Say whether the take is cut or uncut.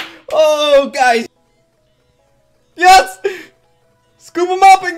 cut